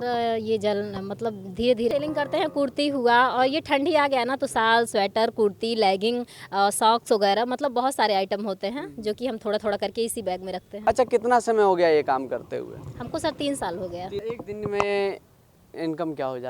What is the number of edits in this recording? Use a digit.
3